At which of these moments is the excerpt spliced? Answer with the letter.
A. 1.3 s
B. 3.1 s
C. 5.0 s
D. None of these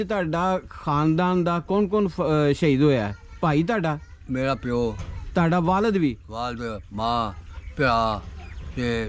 D